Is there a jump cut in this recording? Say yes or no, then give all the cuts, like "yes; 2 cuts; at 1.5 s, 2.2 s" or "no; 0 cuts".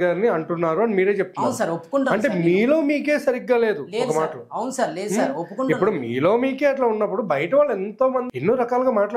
yes; 1 cut; at 8.3 s